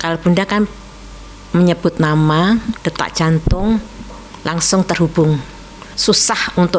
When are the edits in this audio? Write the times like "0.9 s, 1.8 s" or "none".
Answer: none